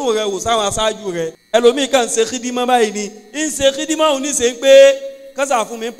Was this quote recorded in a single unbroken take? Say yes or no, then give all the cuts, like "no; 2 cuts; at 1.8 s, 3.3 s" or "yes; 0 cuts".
no; 1 cut; at 1.4 s